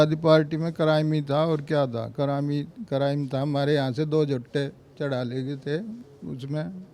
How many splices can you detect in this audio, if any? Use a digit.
0